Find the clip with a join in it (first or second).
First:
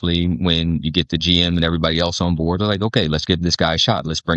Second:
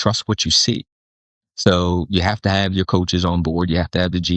second